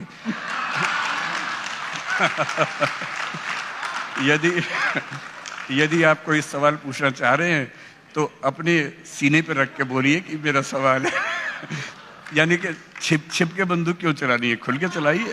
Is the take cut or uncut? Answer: uncut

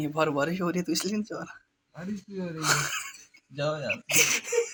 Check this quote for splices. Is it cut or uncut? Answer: uncut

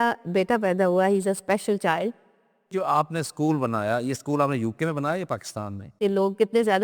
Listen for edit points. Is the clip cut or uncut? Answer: cut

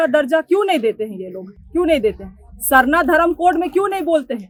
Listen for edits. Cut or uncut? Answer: uncut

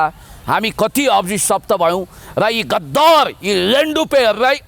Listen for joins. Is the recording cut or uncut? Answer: uncut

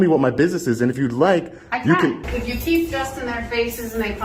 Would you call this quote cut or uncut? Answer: cut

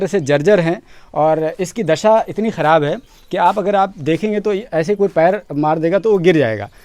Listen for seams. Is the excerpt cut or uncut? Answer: uncut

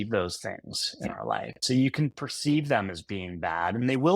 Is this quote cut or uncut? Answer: cut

